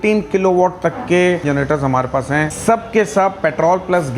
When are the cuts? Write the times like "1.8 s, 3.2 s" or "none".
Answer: 1.4 s, 2.5 s